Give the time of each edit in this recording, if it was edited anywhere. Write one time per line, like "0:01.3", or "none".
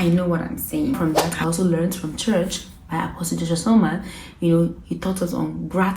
0:01.0